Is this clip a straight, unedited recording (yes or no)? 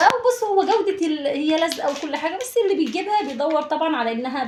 yes